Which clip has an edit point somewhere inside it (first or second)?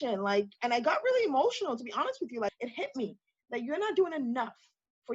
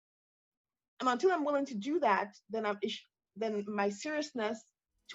first